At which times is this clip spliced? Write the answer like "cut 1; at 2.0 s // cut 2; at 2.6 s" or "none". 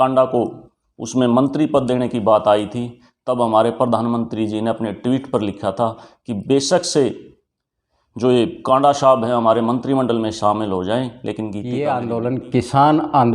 cut 1; at 11.6 s